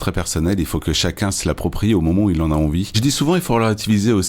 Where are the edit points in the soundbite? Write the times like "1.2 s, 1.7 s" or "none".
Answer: 3.0 s